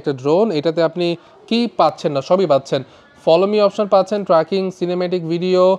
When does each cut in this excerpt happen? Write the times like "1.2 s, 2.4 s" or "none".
none